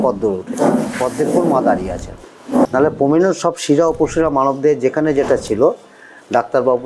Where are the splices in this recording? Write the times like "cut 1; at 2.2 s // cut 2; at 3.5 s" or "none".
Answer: cut 1; at 2.6 s

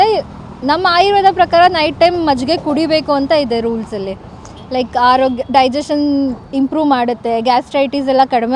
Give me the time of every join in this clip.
none

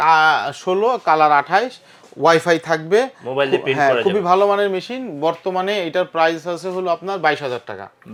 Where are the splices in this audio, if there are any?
none

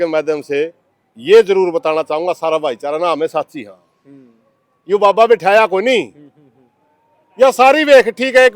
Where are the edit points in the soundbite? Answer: none

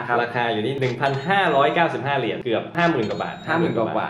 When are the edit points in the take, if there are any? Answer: cut 1; at 2.4 s

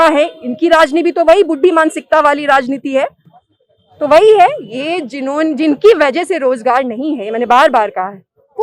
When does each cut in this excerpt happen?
none

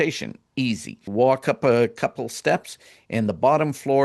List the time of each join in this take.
cut 1; at 1.0 s

